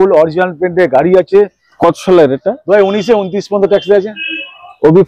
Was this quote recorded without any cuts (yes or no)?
no